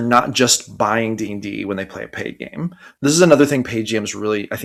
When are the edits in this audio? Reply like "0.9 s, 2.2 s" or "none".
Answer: none